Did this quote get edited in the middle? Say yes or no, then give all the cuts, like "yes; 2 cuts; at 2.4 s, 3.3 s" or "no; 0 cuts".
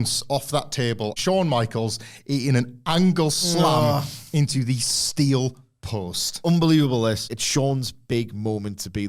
yes; 2 cuts; at 1.2 s, 7.3 s